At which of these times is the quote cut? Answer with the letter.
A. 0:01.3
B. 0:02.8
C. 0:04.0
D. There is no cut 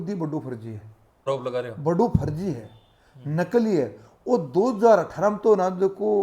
A